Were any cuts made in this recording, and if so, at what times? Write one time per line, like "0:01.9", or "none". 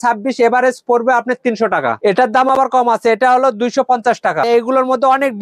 0:02.0
0:04.5

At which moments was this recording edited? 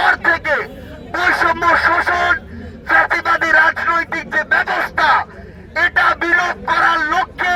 none

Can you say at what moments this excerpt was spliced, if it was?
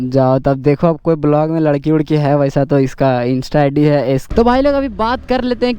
0:04.2

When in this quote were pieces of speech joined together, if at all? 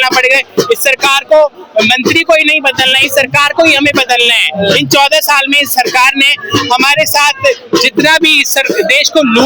none

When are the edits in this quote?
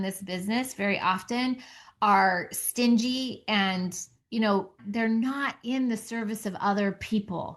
0:04.8

